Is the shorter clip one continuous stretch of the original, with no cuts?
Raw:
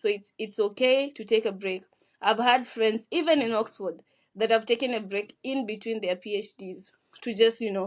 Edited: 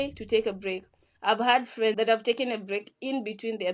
no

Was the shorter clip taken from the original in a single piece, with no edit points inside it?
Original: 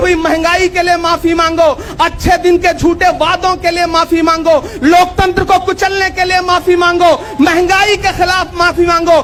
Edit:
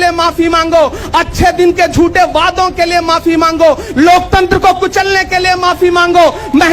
yes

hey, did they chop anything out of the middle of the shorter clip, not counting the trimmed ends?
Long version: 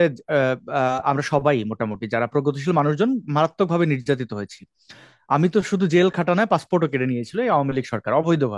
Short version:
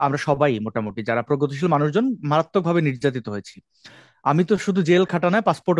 no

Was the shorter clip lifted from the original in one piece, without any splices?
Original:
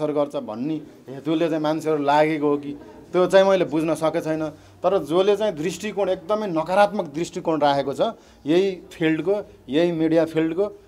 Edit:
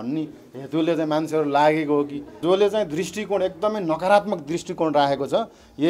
no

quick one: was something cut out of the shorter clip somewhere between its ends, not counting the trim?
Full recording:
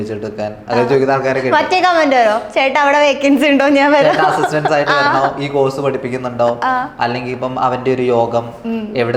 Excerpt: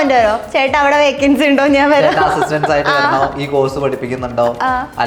no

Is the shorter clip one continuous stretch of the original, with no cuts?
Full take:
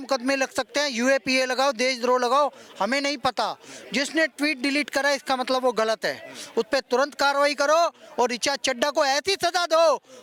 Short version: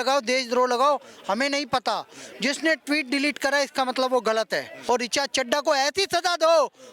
no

